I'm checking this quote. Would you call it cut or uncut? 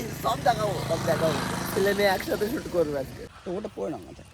cut